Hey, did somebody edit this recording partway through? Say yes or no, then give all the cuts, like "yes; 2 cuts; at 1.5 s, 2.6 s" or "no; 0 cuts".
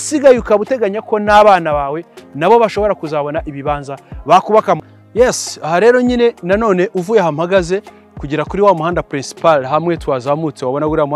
yes; 1 cut; at 4.8 s